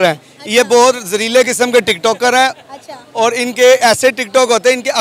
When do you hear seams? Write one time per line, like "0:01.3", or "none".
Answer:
none